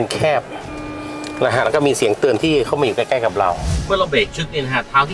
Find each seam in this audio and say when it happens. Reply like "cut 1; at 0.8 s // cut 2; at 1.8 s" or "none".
cut 1; at 3.7 s